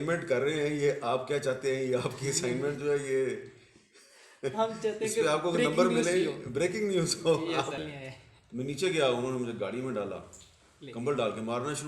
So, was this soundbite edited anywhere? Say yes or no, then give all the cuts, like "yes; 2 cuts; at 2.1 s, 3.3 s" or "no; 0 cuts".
yes; 1 cut; at 7.8 s